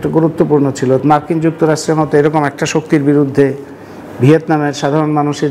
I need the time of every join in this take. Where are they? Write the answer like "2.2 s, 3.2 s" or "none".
1.0 s